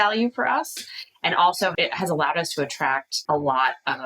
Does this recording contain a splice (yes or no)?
yes